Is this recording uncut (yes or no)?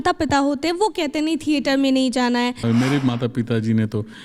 no